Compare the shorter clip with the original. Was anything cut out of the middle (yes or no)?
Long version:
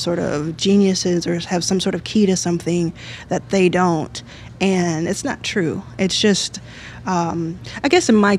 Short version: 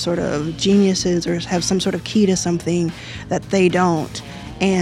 no